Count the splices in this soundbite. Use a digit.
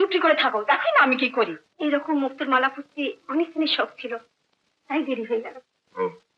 1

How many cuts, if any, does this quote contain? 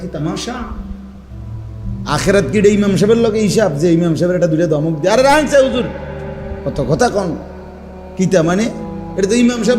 2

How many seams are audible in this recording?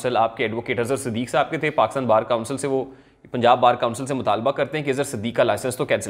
0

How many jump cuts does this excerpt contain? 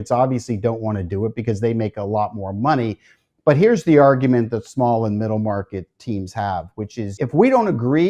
1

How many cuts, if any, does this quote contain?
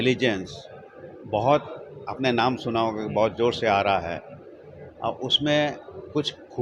0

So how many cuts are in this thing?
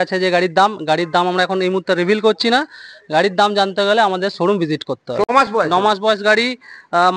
1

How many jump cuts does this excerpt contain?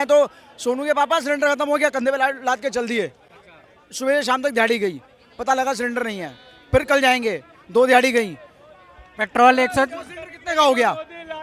0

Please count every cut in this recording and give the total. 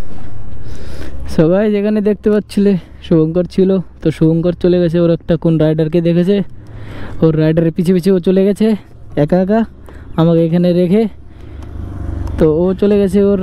0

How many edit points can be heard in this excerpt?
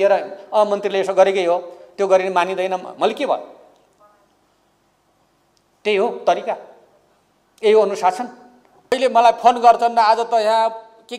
1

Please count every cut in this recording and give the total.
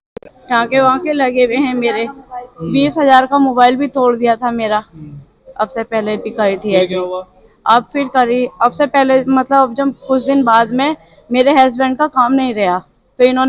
0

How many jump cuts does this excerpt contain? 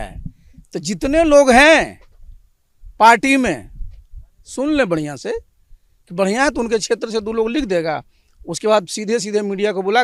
0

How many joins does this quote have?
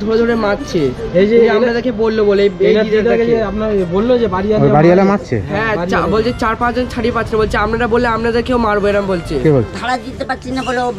1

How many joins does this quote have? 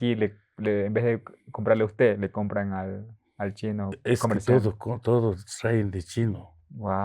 1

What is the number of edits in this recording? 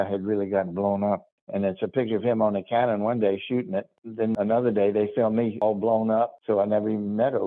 4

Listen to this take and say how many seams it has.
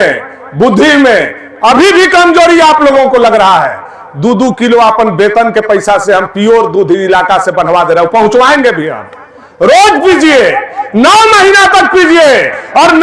0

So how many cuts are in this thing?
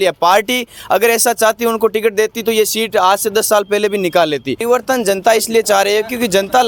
1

